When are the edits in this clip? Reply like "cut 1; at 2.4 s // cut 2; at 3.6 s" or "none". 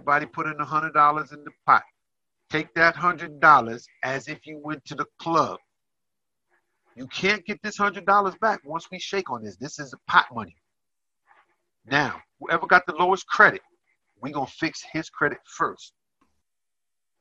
cut 1; at 16.2 s